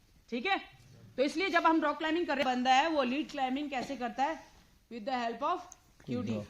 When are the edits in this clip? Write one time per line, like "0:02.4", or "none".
0:02.4